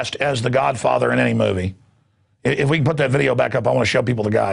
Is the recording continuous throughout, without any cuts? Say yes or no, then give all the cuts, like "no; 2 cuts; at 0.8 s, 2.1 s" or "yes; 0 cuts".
yes; 0 cuts